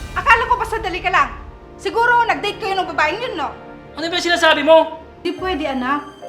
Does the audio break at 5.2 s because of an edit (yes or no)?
yes